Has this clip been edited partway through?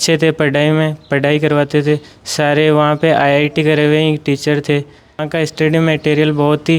yes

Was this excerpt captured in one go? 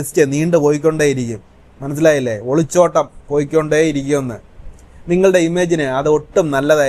yes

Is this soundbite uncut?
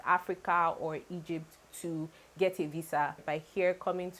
no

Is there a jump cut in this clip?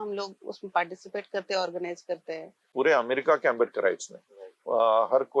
yes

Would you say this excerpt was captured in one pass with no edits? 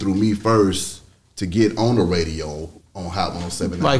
yes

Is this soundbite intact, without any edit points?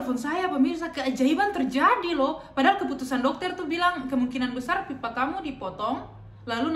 yes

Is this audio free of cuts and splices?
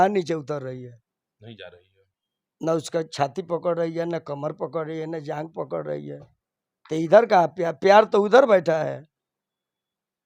yes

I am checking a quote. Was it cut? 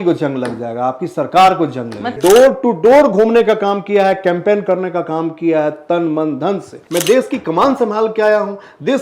yes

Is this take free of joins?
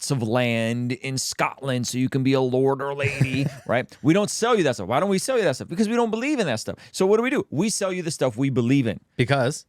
yes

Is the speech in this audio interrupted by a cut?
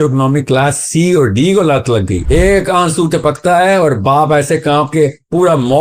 yes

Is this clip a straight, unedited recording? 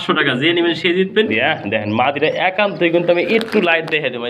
no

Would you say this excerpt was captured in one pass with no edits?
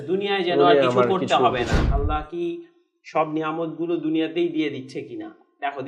no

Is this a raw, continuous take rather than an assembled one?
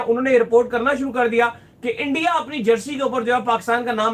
yes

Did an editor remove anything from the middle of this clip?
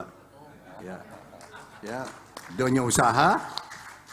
no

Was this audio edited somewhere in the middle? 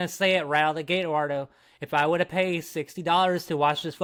no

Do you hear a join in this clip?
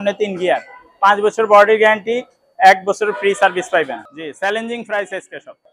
yes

